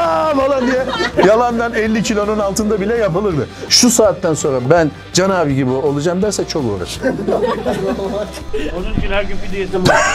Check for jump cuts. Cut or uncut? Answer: cut